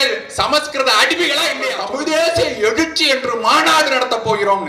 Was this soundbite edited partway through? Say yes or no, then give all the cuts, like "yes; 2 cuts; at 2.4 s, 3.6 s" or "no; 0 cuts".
yes; 1 cut; at 1.7 s